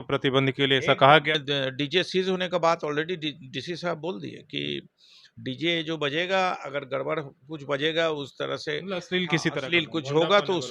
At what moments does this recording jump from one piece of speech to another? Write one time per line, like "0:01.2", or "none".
0:01.4

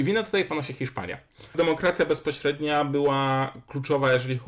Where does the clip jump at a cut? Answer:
0:01.5

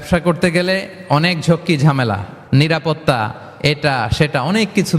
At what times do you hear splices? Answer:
none

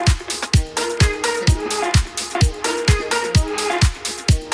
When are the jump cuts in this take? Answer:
none

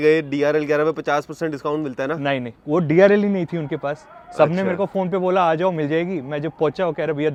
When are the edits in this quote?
none

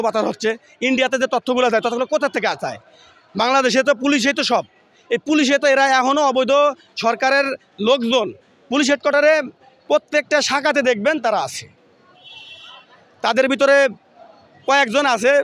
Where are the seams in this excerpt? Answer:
none

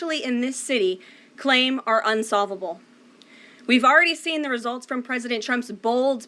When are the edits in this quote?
none

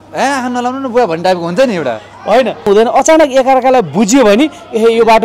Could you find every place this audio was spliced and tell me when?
0:02.7

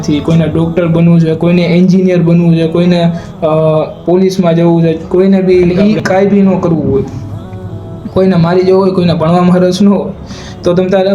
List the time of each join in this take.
0:05.7

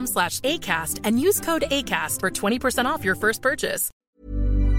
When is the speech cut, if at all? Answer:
0:03.9

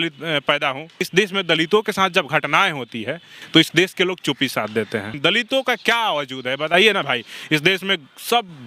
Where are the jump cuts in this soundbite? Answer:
0:01.1
0:05.1

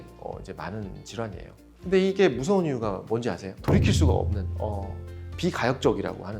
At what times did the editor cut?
0:01.6

